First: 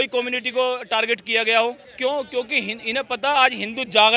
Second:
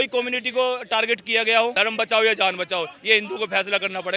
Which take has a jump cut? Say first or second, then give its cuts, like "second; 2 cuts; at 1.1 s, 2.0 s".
second; 1 cut; at 1.7 s